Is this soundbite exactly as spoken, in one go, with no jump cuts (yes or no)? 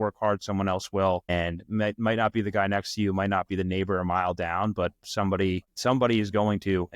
no